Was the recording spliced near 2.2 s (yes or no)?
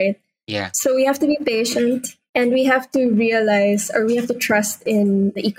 yes